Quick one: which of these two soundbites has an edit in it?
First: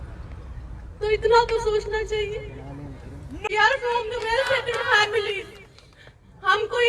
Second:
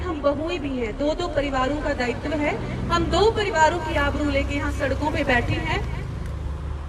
first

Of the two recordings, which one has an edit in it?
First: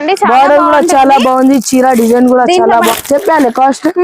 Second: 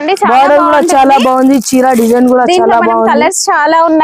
first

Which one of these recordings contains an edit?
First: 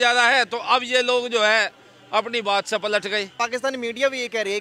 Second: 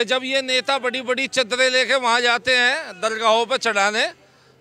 first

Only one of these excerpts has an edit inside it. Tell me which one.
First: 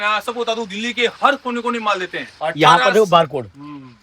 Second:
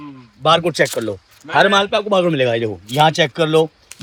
first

